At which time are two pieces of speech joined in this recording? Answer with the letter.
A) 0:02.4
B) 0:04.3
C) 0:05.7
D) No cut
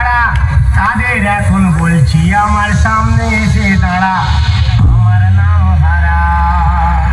D